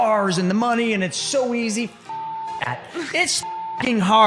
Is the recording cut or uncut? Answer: uncut